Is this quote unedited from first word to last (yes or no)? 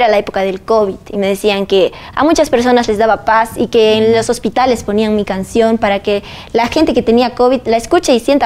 yes